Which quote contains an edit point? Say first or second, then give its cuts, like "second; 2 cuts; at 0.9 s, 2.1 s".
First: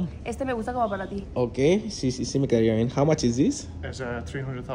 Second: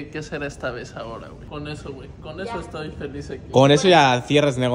second; 1 cut; at 1.4 s